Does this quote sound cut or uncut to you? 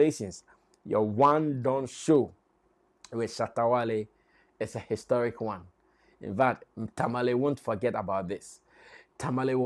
uncut